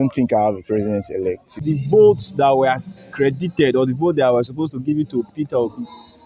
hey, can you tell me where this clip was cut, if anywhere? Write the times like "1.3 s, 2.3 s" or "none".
1.5 s